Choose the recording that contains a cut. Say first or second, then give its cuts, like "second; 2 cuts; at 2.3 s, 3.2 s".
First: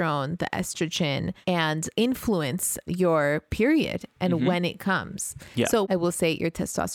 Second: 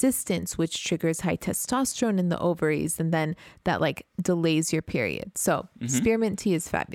first; 3 cuts; at 1.7 s, 2.8 s, 5.9 s